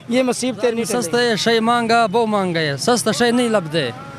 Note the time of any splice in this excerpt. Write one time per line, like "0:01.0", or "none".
0:01.0